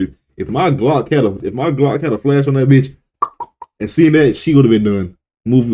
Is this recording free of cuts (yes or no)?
no